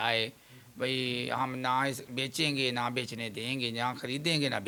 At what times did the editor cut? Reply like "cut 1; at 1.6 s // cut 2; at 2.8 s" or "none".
none

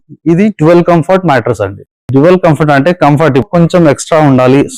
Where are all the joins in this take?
cut 1; at 3.5 s

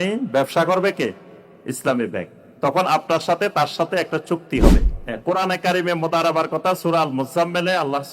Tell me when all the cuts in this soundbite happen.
cut 1; at 4.9 s

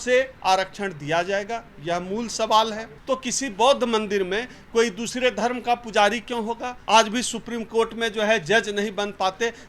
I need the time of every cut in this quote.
cut 1; at 2.9 s // cut 2; at 6.7 s

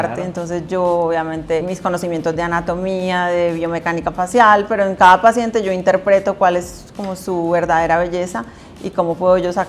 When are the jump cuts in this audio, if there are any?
cut 1; at 1.7 s

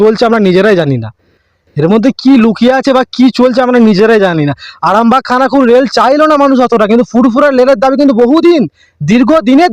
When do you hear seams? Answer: none

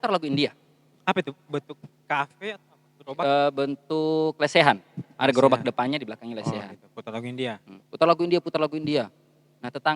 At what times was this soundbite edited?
none

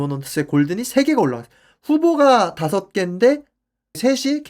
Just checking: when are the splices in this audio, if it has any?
none

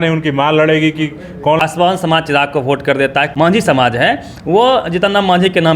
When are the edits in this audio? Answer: cut 1; at 1.6 s // cut 2; at 3.3 s

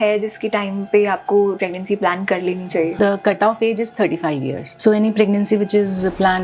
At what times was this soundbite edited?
cut 1; at 1.6 s // cut 2; at 3.0 s // cut 3; at 4.7 s

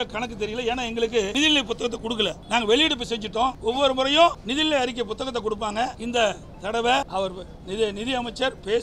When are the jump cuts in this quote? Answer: cut 1; at 1.3 s // cut 2; at 2.4 s // cut 3; at 3.6 s // cut 4; at 4.4 s // cut 5; at 6.0 s // cut 6; at 7.1 s

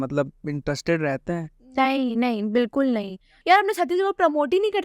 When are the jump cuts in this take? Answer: cut 1; at 1.7 s // cut 2; at 3.3 s

